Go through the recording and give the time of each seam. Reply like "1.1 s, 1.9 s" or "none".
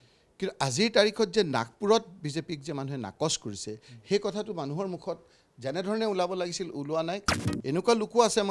7.3 s